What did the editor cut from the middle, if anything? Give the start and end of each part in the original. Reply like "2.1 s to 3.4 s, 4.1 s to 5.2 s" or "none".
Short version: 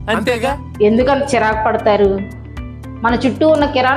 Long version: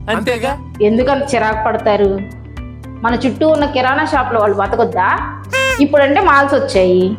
none